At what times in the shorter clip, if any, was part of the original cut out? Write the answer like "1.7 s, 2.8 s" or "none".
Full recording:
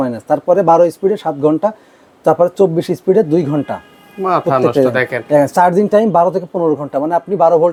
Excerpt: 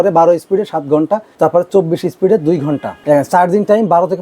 1.3 s, 2.9 s